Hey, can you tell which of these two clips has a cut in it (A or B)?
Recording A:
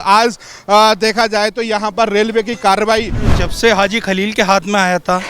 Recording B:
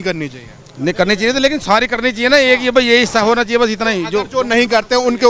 A